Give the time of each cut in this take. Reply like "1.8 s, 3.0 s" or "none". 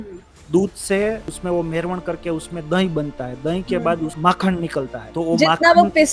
1.3 s, 4.1 s, 5.0 s